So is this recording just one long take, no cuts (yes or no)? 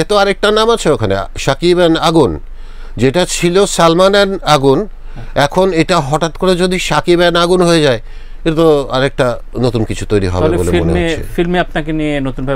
yes